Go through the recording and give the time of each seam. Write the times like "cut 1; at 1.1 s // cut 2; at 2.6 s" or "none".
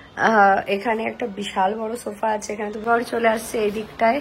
cut 1; at 2.8 s